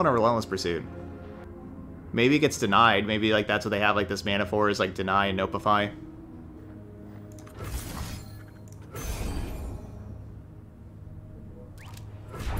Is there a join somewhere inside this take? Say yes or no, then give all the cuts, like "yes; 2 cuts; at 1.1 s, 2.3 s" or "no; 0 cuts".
no; 0 cuts